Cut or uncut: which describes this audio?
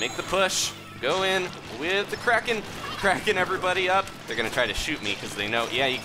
uncut